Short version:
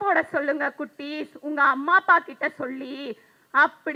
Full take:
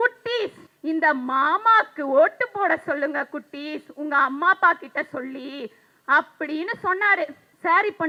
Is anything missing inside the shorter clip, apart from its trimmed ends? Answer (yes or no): no